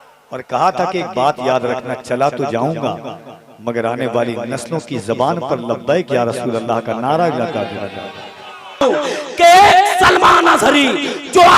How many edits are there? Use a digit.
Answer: 1